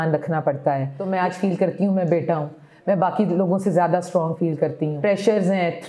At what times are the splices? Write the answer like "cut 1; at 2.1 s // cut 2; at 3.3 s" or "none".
cut 1; at 1.0 s // cut 2; at 4.9 s